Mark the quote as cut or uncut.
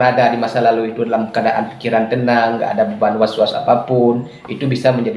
uncut